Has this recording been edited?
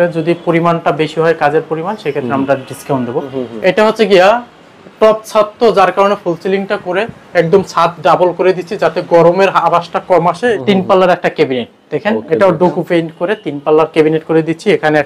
yes; 2 cuts; at 3.4 s, 10.6 s

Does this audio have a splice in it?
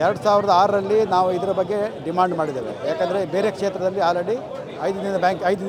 no; 0 cuts

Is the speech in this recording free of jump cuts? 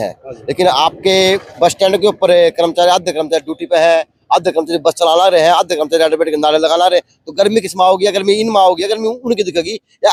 yes; 0 cuts

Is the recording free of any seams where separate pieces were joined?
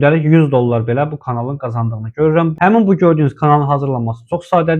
no; 1 cut; at 2.5 s

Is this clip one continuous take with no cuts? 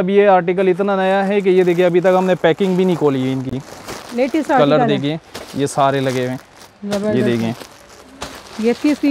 yes; 0 cuts

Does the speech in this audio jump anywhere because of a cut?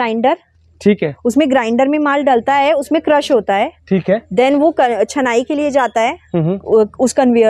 no; 0 cuts

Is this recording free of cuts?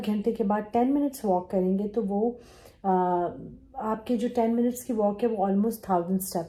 yes; 0 cuts

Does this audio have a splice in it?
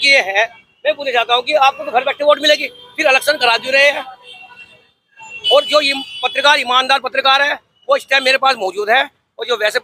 no; 0 cuts

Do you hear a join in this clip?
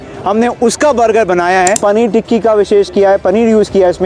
yes; 1 cut; at 1.8 s

